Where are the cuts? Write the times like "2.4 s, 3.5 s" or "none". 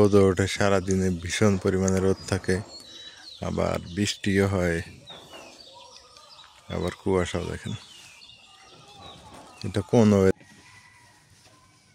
10.3 s